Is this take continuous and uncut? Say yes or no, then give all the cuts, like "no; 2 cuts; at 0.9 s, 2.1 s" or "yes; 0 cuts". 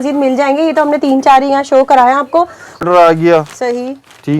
no; 1 cut; at 2.8 s